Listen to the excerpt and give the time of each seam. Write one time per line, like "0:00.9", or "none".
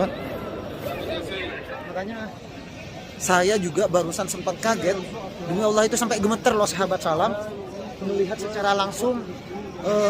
0:01.7

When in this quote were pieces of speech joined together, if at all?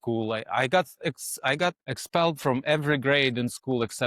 0:01.9

